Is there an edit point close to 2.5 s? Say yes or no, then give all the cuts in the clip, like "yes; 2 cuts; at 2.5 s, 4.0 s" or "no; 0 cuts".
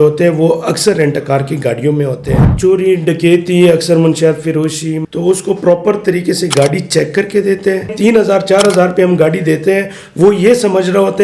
yes; 3 cuts; at 2.5 s, 4.9 s, 7.9 s